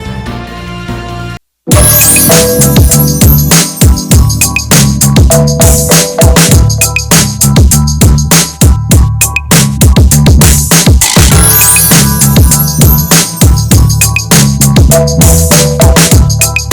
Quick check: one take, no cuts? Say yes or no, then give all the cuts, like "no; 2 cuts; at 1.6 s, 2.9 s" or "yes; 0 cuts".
no; 1 cut; at 1.4 s